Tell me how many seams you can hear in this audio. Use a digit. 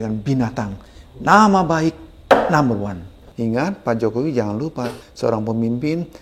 2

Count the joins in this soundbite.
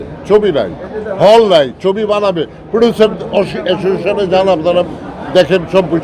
0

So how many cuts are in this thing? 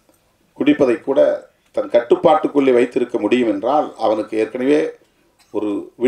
0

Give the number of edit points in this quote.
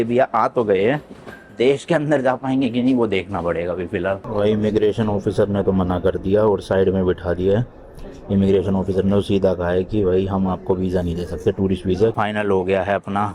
2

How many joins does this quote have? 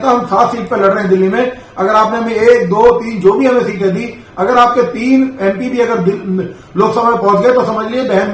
0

